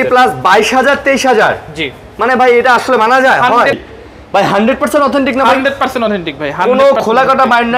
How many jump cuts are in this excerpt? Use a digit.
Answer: 1